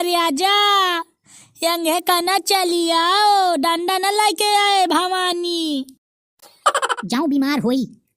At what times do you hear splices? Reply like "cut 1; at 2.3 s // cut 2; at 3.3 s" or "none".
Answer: cut 1; at 7.0 s